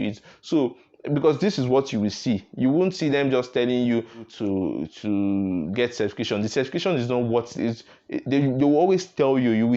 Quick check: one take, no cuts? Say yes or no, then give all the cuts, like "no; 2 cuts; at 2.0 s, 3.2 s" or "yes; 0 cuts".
no; 1 cut; at 4.3 s